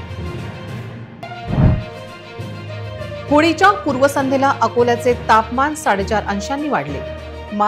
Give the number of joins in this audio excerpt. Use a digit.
1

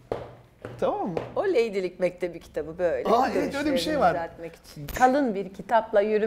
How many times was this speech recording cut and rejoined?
1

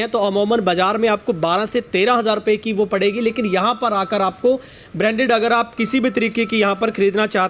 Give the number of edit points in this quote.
0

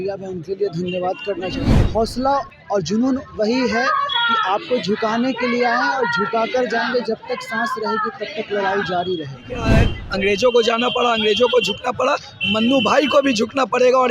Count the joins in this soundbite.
2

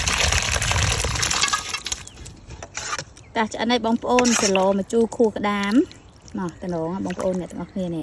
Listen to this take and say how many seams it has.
1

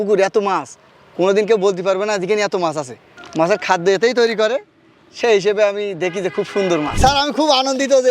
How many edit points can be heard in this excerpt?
1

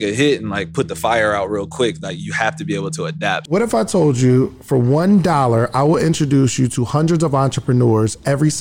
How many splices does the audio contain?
1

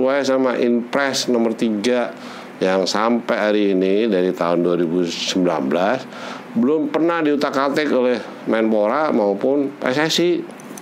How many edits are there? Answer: 0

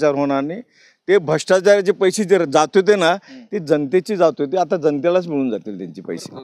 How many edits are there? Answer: 0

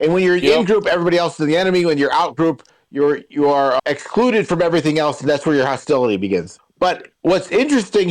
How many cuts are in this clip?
2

